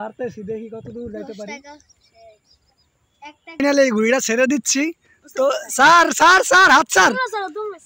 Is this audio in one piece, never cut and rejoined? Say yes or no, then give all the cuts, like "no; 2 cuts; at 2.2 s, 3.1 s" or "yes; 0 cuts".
no; 1 cut; at 3.6 s